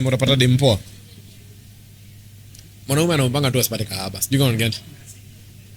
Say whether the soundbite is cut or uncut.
uncut